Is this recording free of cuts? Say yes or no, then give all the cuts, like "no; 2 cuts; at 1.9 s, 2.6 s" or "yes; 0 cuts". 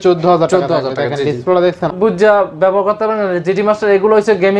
no; 1 cut; at 1.9 s